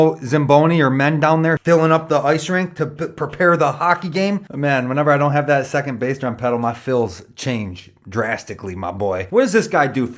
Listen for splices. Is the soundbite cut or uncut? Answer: cut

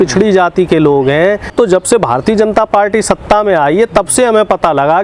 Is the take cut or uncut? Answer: cut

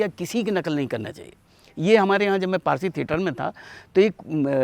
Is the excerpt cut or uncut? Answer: uncut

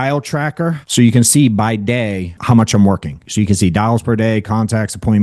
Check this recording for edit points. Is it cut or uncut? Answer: cut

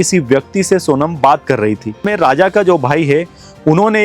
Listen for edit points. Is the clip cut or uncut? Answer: cut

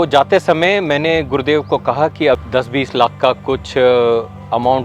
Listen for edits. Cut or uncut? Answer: cut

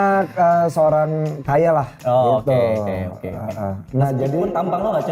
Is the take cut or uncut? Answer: uncut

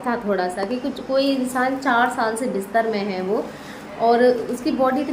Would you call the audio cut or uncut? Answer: uncut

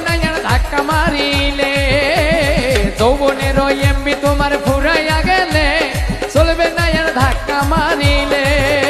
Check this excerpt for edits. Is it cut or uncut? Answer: cut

